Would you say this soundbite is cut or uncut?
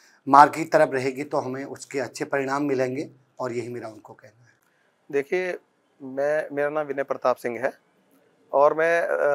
uncut